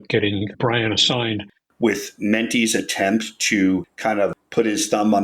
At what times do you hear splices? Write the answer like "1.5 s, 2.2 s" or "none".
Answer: 1.6 s

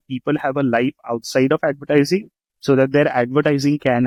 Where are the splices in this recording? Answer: none

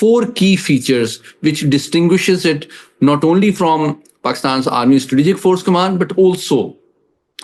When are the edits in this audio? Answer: none

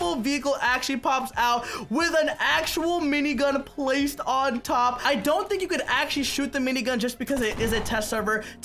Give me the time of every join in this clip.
none

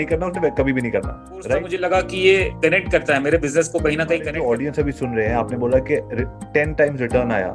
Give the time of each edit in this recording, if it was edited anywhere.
1.7 s, 4.3 s

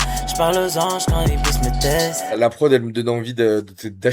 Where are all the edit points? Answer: 2.3 s

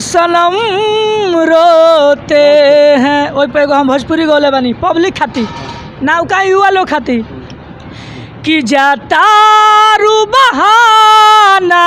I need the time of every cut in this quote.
none

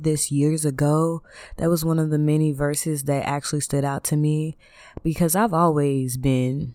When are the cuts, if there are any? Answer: none

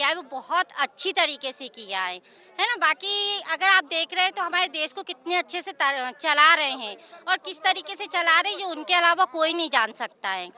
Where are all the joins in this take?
none

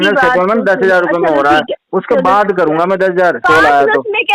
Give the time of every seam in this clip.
3.4 s

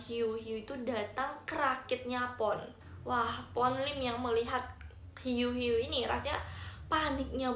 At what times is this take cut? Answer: none

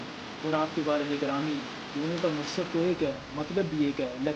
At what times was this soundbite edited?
none

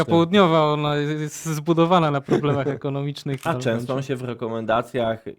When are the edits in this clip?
3.4 s

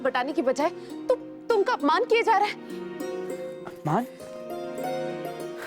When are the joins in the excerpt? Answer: none

